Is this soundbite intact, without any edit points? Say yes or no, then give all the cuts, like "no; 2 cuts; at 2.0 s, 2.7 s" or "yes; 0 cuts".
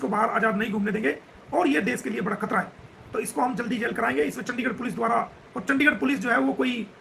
yes; 0 cuts